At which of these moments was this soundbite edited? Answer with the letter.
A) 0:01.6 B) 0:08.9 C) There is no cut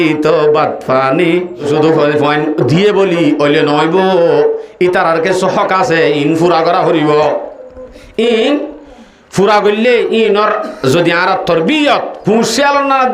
A